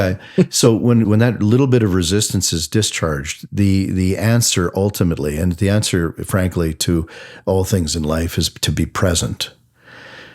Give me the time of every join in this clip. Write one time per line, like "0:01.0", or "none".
0:01.1